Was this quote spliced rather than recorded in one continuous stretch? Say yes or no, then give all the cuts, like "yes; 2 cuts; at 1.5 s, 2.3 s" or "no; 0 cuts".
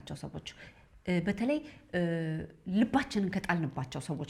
no; 0 cuts